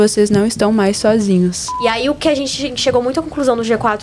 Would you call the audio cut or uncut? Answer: cut